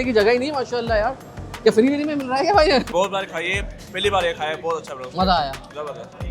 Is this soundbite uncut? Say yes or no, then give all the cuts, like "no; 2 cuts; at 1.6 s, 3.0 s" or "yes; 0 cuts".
no; 1 cut; at 2.9 s